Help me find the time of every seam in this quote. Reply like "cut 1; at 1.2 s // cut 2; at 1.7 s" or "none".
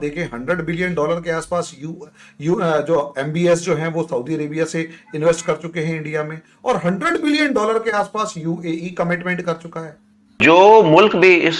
cut 1; at 10.4 s